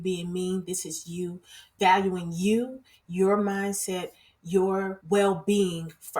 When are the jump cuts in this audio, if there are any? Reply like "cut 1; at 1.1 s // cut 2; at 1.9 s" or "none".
cut 1; at 5.0 s